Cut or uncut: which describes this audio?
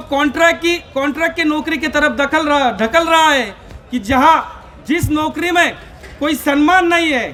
uncut